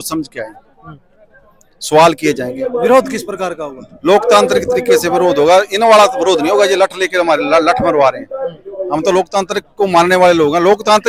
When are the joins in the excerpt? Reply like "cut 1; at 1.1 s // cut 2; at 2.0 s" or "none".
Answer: none